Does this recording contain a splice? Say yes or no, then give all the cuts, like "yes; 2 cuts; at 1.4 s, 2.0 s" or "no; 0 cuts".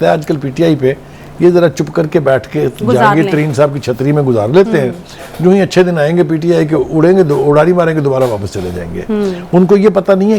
no; 0 cuts